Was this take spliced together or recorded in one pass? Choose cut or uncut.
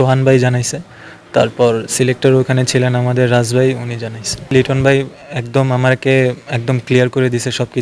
cut